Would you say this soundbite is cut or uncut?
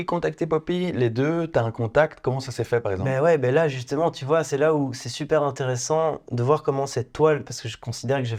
uncut